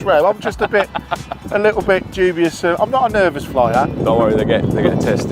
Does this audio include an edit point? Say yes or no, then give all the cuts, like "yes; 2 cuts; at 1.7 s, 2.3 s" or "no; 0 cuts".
no; 0 cuts